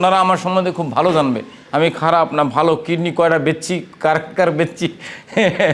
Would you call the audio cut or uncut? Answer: uncut